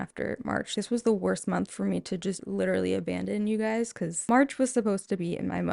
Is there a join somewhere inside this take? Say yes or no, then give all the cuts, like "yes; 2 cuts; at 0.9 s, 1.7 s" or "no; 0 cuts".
yes; 3 cuts; at 0.7 s, 2.4 s, 4.3 s